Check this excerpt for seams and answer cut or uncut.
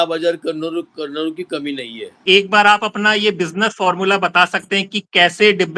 cut